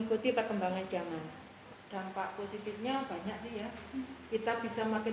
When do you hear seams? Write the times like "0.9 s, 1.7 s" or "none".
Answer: 1.6 s